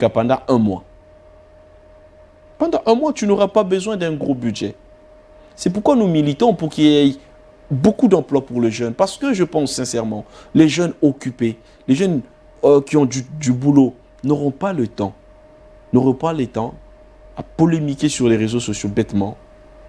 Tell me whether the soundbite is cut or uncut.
uncut